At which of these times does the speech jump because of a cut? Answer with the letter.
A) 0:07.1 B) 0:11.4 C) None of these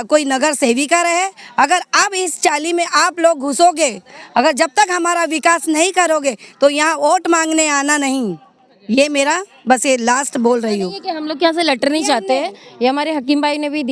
C